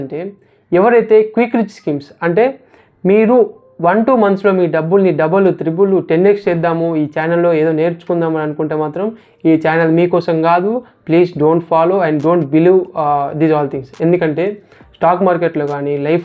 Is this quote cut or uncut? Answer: uncut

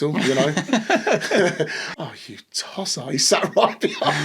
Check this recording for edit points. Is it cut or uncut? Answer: cut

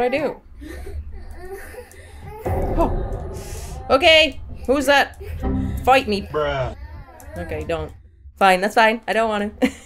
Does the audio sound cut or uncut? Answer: cut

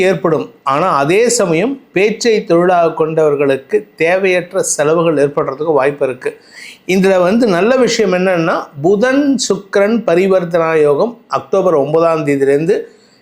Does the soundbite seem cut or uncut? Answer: uncut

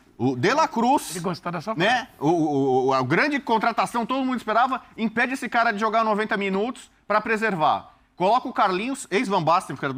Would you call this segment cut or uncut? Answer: uncut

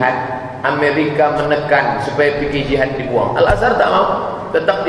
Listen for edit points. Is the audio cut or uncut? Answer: uncut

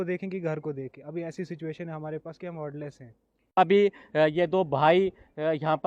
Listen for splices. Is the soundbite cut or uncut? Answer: cut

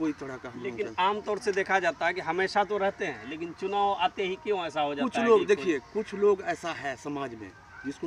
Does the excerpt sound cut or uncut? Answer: uncut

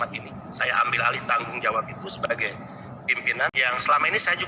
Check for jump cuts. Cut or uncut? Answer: cut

